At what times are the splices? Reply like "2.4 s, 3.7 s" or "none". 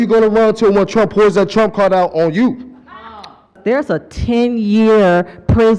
3.6 s